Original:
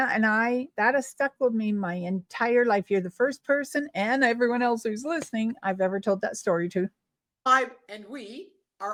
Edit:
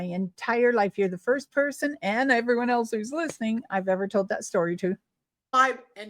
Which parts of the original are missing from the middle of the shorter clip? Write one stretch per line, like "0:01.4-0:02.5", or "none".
none